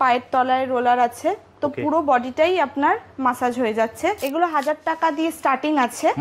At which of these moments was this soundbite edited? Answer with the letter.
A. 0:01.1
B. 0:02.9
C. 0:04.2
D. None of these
C